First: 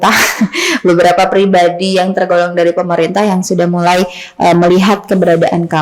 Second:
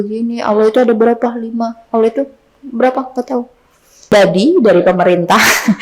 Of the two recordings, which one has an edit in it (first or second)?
second